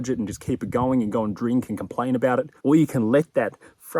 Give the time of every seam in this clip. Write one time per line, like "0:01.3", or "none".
0:02.5